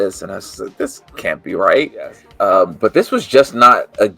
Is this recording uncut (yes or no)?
no